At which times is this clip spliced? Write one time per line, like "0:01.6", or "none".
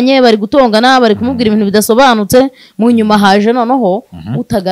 none